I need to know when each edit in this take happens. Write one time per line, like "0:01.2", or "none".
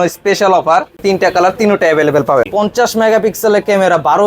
0:01.0
0:02.5